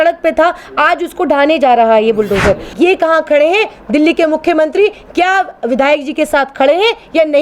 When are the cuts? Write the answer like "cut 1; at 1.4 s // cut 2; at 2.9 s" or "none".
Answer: cut 1; at 2.7 s